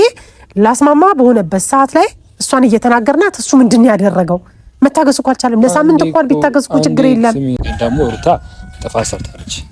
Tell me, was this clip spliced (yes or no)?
yes